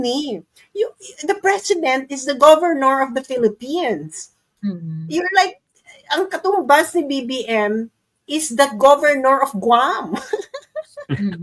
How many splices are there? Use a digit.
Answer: 0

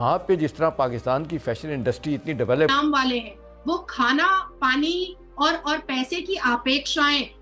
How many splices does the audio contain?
1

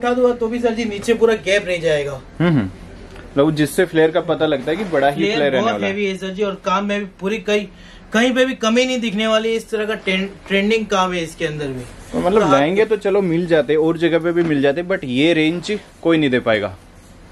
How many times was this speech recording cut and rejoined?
0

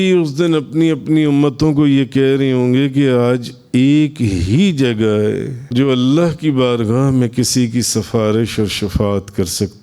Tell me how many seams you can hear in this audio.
1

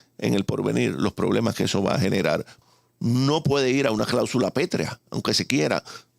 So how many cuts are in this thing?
1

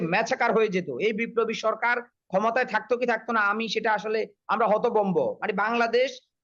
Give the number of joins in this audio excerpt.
0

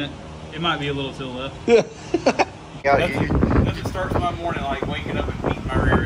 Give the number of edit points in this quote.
1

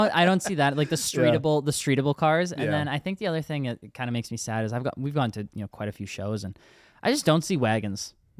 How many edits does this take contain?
0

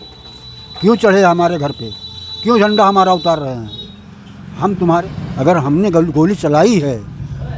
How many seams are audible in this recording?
1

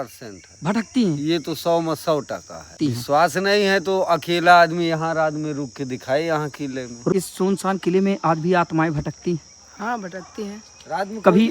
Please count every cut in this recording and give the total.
2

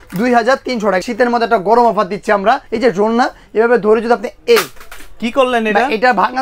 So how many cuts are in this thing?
2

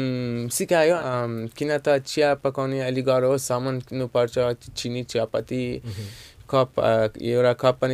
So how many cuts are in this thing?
1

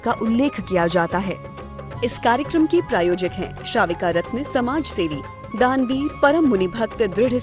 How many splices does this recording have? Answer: 1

